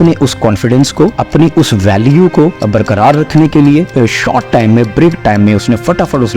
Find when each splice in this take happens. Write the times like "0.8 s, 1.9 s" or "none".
1.2 s, 2.6 s, 3.9 s